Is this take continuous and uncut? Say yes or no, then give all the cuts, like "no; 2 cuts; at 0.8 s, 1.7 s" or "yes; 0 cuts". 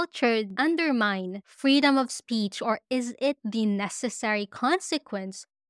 yes; 0 cuts